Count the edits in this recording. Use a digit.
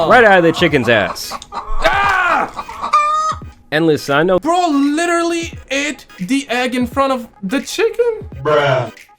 1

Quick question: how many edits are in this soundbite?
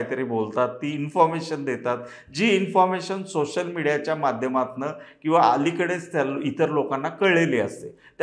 0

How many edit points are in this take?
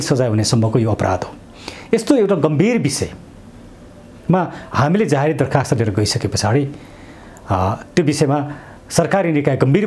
0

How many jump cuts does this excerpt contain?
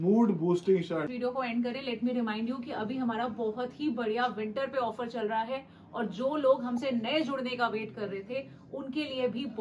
1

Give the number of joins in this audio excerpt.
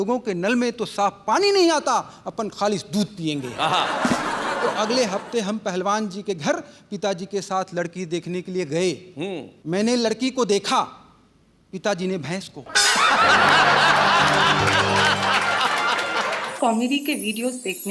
1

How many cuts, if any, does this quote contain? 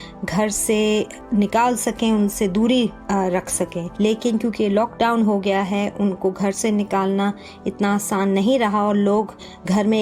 1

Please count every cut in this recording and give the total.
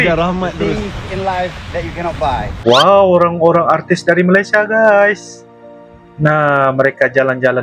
1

